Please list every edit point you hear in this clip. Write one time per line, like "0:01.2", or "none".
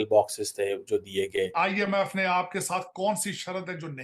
0:01.9

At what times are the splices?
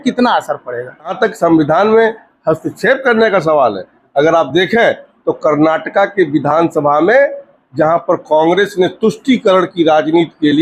0:01.1

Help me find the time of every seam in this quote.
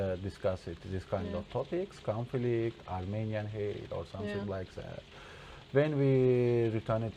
none

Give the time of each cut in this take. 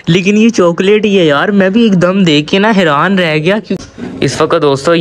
0:03.8

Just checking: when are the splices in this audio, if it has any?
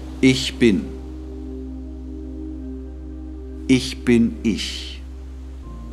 0:00.9
0:03.7
0:04.6

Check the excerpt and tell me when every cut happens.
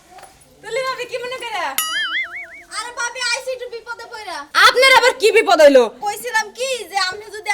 0:06.0

